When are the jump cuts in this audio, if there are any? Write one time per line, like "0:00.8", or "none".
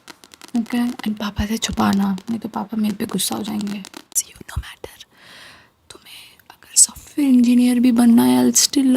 0:04.2